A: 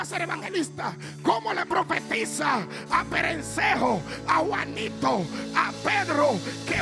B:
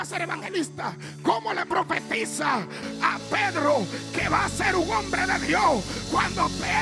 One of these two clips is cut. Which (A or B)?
B